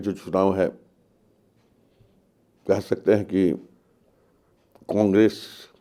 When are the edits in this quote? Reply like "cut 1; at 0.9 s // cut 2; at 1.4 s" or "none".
none